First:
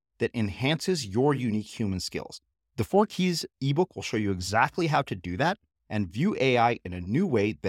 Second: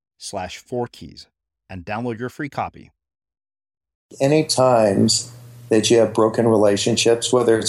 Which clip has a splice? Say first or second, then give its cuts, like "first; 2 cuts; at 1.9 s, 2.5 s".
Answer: second; 1 cut; at 4.1 s